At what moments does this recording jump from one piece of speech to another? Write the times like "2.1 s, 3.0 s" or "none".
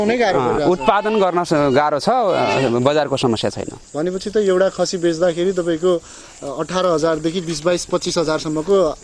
none